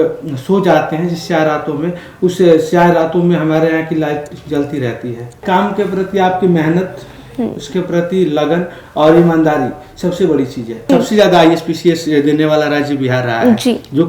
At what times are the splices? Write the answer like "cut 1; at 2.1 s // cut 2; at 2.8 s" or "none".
cut 1; at 5.4 s // cut 2; at 10.9 s